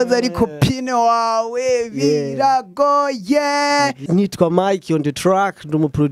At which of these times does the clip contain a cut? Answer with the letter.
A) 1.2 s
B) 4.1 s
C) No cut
B